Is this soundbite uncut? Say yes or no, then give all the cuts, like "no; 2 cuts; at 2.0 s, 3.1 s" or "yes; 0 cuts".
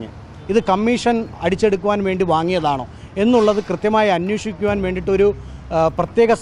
no; 1 cut; at 1.4 s